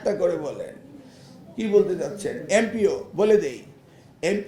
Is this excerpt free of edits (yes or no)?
yes